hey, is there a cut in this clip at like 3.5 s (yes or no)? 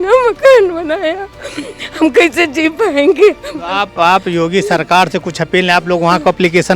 no